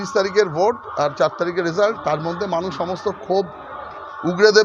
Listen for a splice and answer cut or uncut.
uncut